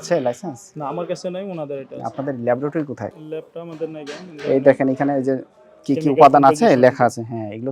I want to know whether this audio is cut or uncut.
cut